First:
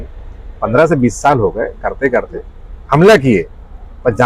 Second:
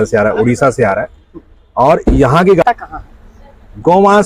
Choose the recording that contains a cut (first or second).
second